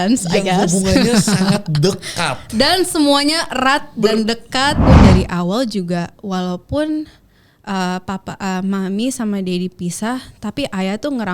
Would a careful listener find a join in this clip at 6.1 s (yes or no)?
no